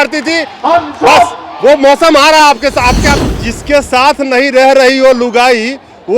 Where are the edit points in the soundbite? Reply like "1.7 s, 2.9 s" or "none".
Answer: 3.2 s